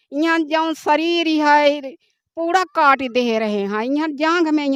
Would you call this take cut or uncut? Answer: uncut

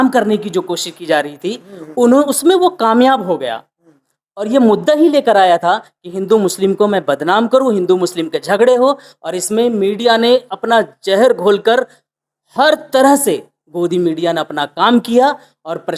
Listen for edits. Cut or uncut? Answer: uncut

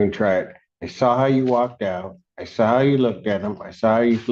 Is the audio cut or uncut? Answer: uncut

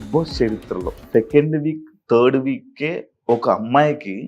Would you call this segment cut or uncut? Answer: cut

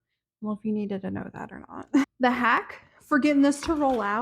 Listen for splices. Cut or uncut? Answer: cut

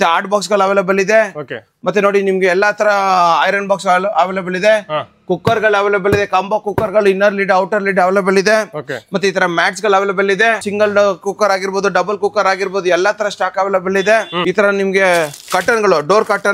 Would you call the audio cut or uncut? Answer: uncut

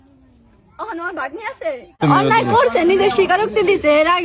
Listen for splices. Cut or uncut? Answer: cut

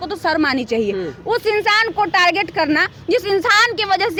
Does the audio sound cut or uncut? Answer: uncut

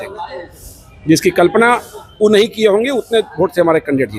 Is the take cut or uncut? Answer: uncut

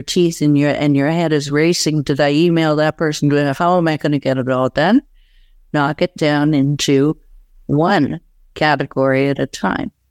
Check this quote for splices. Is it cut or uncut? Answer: uncut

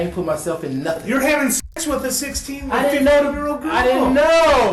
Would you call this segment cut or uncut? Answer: uncut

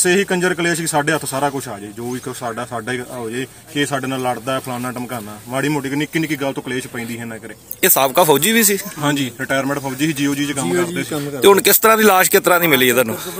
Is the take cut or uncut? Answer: uncut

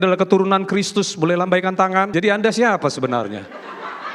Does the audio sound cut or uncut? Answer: cut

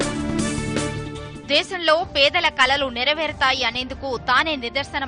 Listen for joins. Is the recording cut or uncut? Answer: uncut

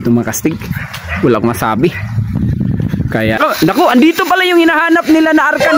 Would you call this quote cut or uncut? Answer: cut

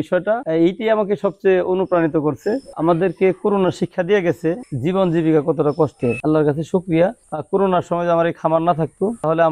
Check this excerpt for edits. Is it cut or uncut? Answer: cut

